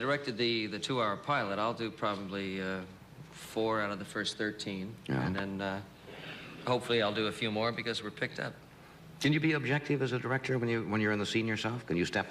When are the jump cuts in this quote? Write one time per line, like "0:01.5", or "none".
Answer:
0:03.7